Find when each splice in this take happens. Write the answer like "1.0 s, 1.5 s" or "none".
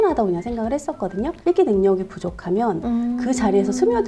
1.3 s